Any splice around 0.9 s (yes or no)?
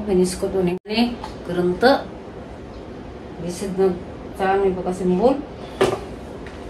yes